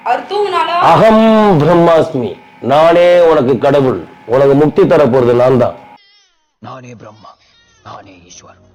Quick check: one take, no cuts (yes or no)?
yes